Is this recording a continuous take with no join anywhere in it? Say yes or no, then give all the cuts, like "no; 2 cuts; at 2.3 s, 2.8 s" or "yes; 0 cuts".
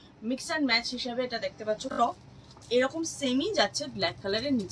no; 1 cut; at 1.9 s